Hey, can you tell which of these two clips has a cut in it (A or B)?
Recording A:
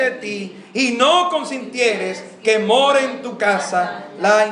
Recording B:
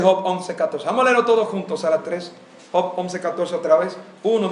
B